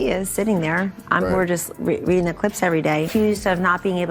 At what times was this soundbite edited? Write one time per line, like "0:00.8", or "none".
0:03.0